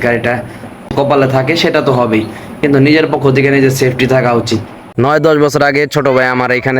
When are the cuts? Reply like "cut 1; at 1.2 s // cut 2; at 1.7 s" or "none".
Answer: cut 1; at 0.9 s // cut 2; at 4.8 s